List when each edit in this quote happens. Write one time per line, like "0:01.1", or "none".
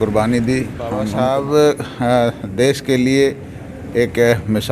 0:01.1